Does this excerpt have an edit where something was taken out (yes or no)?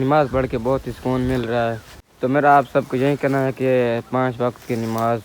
yes